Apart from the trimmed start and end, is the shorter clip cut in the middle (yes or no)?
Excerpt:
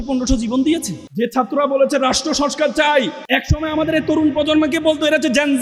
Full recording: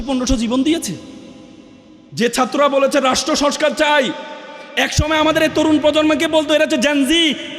yes